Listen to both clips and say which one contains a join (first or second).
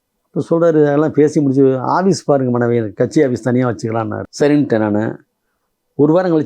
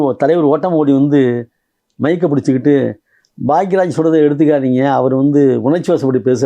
first